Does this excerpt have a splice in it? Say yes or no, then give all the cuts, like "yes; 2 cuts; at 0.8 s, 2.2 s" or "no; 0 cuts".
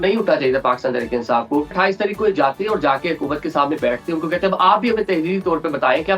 yes; 1 cut; at 1.7 s